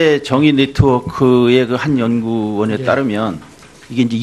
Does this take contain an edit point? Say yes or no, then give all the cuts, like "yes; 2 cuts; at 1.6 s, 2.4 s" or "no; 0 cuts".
no; 0 cuts